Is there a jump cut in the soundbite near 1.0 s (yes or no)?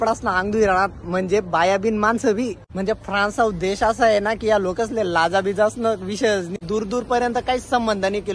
no